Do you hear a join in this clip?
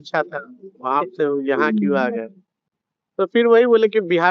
no; 0 cuts

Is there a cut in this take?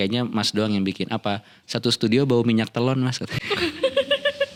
no; 0 cuts

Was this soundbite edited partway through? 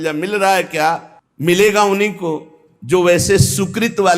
no; 0 cuts

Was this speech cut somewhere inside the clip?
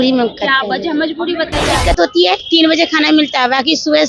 yes; 1 cut; at 1.7 s

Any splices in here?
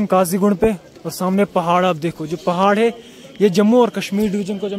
no; 0 cuts

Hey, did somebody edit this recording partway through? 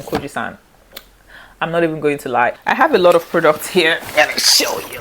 yes; 1 cut; at 2.6 s

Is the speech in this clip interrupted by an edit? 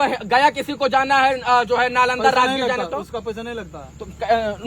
no; 0 cuts

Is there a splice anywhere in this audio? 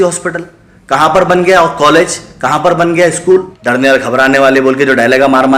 yes; 1 cut; at 3.6 s

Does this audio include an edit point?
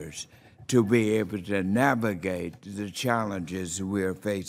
no; 0 cuts

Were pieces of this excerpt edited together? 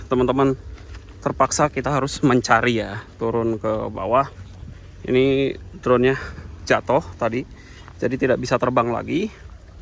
no; 0 cuts

